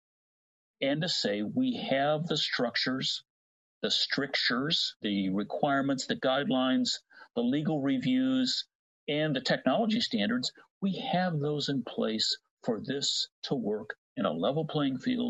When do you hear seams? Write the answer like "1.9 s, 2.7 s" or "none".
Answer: 5.0 s